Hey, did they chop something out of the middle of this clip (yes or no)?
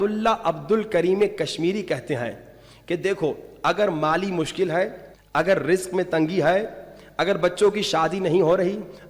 no